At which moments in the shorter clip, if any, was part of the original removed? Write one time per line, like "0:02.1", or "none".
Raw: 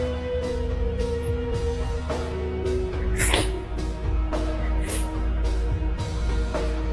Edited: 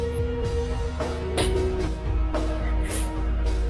0:01.8

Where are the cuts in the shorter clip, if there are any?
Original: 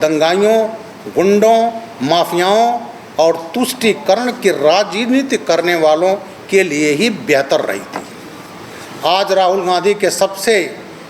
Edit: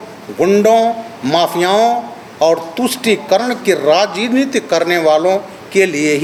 none

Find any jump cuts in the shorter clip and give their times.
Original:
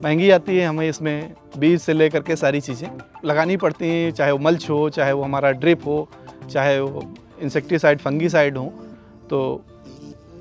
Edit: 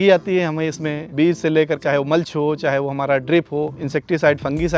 0:01.0
0:01.8
0:03.8

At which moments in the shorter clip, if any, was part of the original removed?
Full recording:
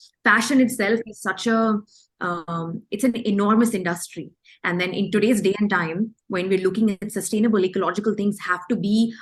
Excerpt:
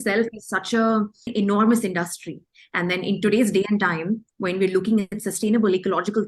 0:01.3

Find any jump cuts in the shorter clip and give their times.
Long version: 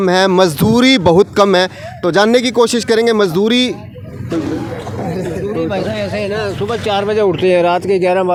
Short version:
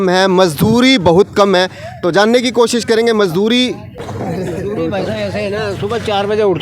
0:04.0

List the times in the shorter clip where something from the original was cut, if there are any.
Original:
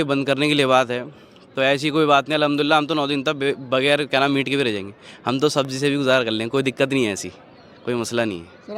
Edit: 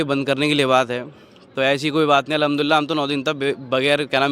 none

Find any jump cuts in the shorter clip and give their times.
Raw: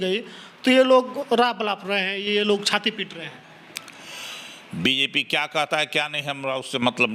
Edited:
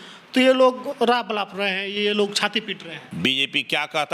0:03.0

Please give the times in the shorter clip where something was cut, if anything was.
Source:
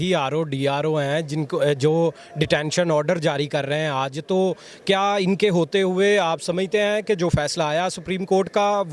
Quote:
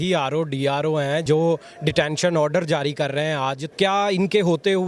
0:01.2
0:03.6

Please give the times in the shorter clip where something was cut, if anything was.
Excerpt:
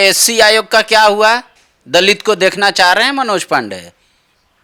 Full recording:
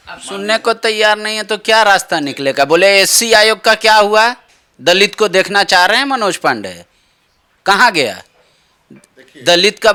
none

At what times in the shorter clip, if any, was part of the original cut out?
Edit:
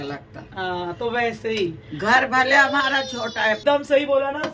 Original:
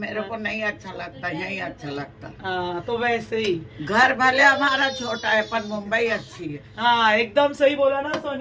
0:03.6

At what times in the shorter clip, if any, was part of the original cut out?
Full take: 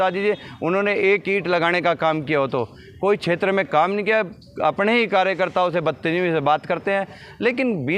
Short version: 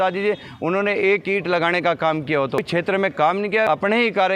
0:02.6
0:03.7

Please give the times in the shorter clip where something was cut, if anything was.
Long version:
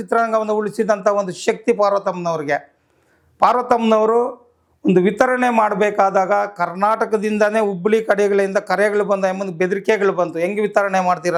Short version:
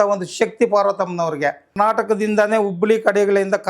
0:01.7

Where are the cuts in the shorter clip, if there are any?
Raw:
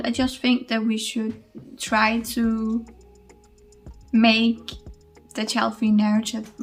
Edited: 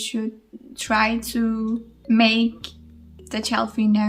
0:01.9

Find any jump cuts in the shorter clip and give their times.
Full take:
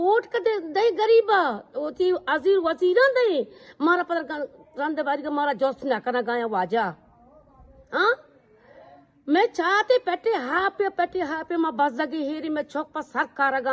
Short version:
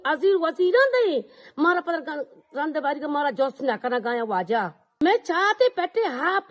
0:04.8

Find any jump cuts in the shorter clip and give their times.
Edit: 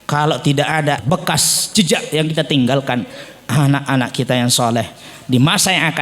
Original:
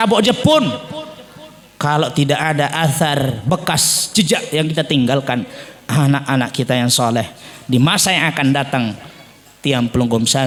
0:01.0

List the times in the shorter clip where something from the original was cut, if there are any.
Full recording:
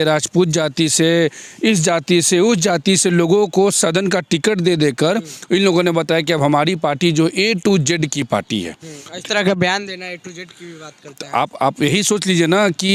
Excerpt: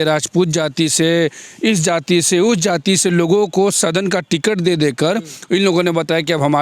none

